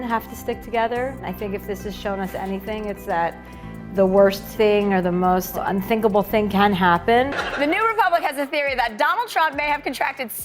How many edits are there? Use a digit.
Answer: 1